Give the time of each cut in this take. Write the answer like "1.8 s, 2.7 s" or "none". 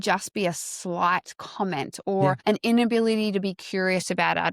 2.4 s